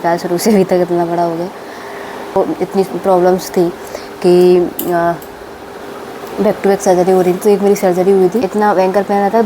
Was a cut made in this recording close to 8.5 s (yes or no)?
yes